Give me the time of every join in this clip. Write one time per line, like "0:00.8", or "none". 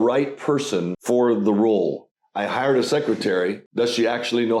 0:00.9
0:02.1
0:03.6